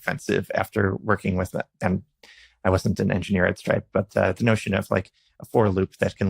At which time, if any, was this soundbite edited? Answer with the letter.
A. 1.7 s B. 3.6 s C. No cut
A